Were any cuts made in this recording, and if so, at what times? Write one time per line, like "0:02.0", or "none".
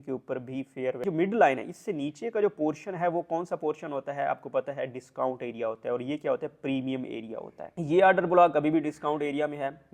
0:01.0
0:07.6

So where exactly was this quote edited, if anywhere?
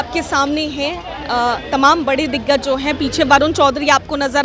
none

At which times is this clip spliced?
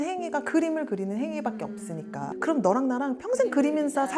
0:02.3

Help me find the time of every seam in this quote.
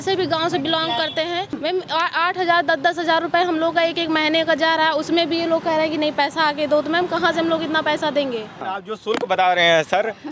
0:01.6
0:08.7

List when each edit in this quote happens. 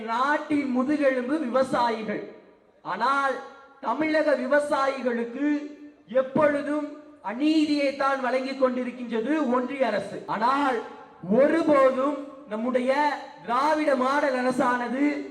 0:10.2

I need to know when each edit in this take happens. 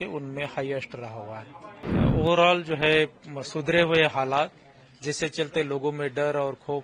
0:01.8

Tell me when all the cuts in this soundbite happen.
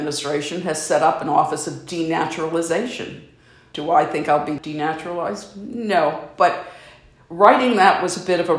0:03.7
0:04.6

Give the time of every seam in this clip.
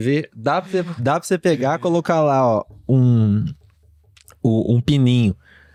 none

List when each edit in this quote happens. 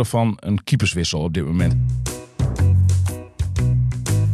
0:01.8

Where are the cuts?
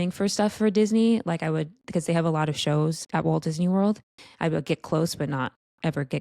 0:03.0
0:04.2

